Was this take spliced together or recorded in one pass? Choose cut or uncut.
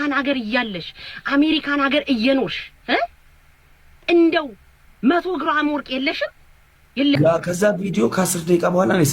cut